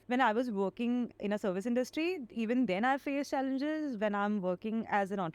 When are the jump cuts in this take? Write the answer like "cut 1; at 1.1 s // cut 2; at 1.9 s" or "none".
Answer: cut 1; at 1.2 s